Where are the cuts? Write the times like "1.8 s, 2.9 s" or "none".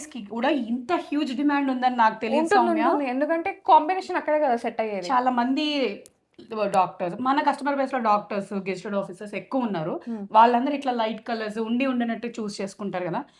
none